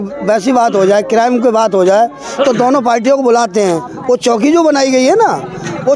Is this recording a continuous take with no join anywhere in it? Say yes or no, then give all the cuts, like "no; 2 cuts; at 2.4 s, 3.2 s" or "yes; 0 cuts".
yes; 0 cuts